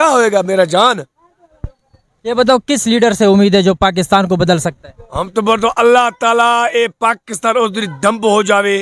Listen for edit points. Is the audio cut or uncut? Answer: uncut